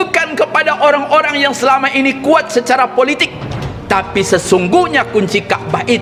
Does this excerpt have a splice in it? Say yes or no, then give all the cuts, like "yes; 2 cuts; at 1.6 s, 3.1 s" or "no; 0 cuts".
no; 0 cuts